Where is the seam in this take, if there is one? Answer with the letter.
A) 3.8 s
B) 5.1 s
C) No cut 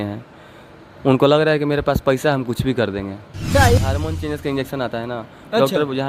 A